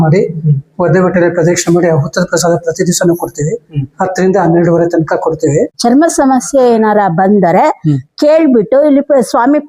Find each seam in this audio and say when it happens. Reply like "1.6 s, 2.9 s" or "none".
5.7 s